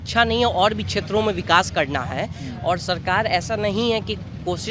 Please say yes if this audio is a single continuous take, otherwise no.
yes